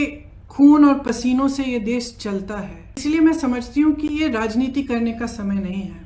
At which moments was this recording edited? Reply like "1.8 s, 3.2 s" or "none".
3.0 s